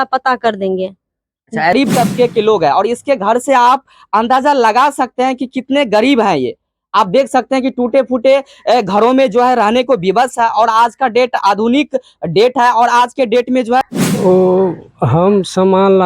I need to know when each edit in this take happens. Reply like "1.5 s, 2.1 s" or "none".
1.7 s, 13.8 s